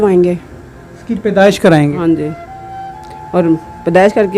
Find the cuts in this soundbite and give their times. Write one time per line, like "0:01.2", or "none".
none